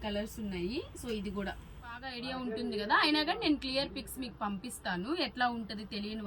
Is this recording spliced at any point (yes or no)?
yes